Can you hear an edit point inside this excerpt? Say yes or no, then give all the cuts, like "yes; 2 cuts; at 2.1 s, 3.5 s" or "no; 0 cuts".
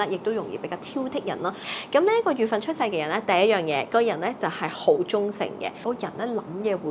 yes; 2 cuts; at 1.7 s, 5.8 s